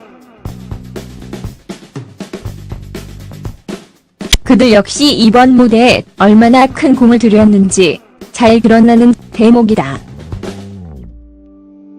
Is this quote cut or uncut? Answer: cut